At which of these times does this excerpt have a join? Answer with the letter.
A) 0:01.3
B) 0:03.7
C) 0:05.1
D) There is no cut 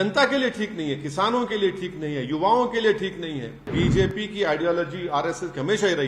B